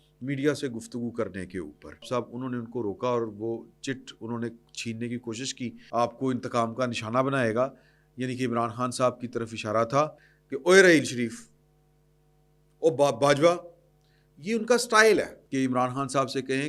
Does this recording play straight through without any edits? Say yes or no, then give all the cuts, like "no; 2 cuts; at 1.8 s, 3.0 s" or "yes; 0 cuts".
no; 4 cuts; at 2.1 s, 5.7 s, 10.3 s, 15.4 s